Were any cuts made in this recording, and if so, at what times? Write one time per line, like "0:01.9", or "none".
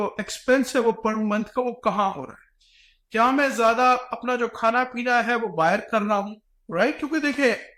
none